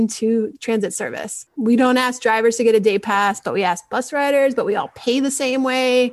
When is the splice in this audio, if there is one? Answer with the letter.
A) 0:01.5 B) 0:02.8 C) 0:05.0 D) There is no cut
A